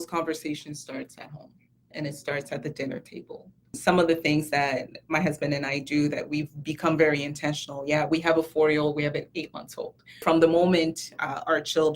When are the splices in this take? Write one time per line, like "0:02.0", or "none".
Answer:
0:03.8
0:10.2